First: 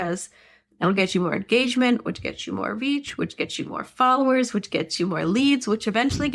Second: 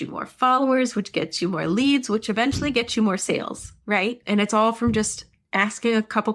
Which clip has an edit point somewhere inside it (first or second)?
second